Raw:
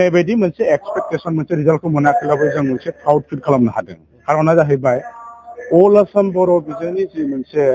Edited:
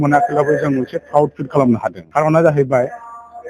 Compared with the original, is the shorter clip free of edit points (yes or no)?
no